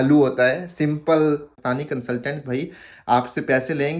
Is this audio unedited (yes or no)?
no